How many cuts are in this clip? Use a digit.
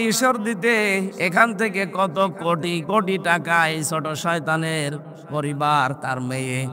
0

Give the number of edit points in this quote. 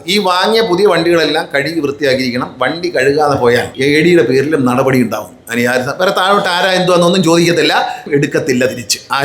2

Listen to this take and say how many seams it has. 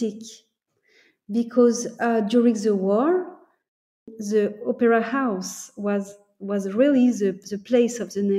1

